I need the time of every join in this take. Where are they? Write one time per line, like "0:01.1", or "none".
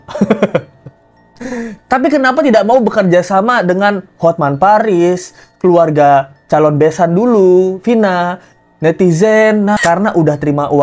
0:09.8